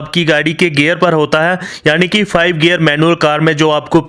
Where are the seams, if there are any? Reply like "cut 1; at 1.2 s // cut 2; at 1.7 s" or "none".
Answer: none